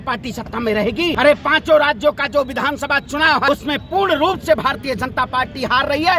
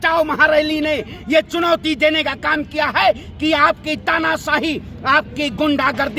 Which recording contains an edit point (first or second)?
first